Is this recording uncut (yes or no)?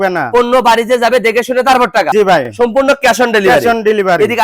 yes